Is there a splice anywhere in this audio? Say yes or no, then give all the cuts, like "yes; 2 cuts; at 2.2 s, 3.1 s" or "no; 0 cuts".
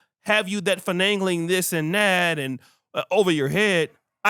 no; 0 cuts